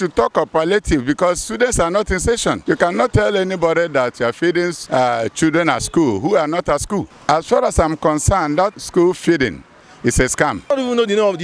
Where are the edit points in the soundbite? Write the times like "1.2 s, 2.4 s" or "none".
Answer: 3.1 s, 4.8 s, 7.1 s, 8.7 s, 10.7 s